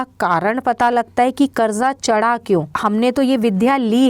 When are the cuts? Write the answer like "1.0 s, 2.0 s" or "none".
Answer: 2.7 s